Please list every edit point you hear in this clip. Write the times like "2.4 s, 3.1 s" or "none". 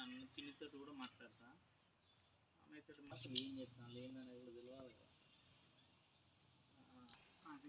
none